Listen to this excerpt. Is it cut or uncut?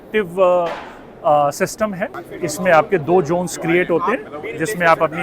cut